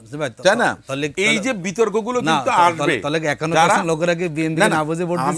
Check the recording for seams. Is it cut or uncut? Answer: uncut